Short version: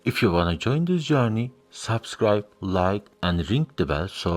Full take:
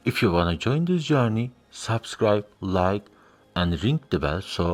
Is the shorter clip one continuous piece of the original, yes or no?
no